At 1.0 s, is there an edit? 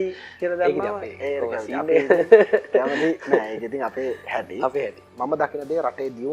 no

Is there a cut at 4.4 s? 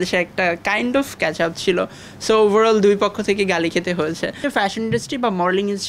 yes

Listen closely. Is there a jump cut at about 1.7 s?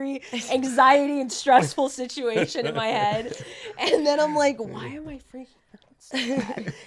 no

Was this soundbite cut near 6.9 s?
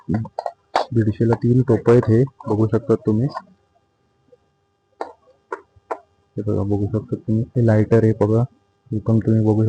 no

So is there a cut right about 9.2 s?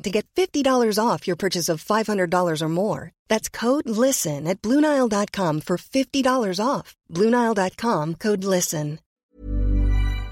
yes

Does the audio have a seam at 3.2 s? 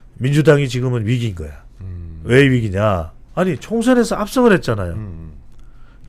yes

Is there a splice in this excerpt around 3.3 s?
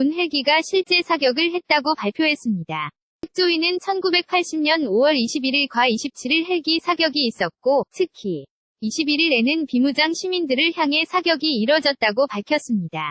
yes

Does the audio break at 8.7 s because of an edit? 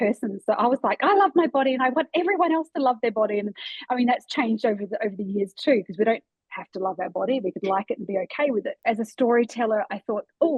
yes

